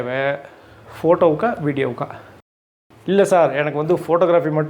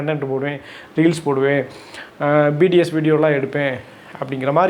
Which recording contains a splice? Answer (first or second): first